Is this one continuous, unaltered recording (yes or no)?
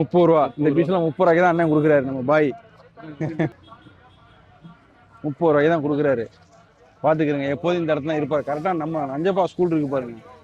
no